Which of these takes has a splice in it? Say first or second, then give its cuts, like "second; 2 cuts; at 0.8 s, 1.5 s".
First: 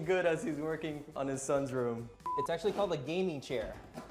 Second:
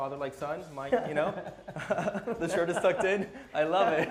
first; 2 cuts; at 1.1 s, 2.3 s